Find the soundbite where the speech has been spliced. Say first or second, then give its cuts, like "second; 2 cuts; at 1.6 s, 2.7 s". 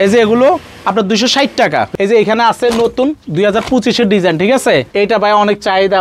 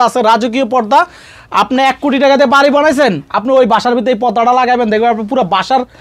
first; 2 cuts; at 1.9 s, 4.9 s